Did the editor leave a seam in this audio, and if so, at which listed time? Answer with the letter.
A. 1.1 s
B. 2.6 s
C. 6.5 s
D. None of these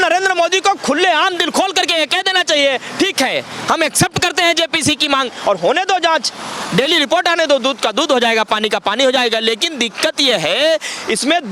D